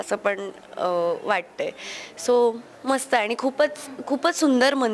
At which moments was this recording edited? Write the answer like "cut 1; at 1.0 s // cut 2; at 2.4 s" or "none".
none

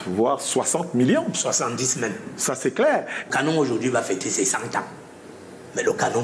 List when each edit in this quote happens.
cut 1; at 3.3 s

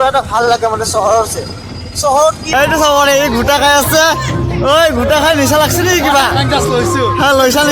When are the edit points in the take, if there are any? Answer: cut 1; at 2.5 s

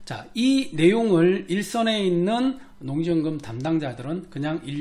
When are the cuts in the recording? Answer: none

